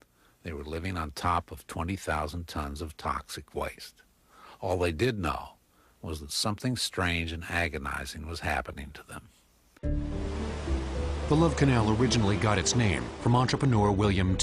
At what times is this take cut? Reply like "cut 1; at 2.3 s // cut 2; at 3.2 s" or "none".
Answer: cut 1; at 8.7 s